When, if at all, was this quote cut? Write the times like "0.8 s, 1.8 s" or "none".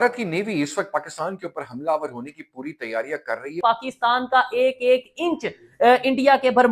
3.6 s